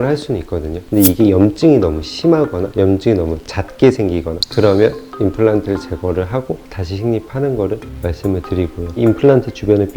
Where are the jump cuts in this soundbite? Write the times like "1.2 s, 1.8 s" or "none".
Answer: none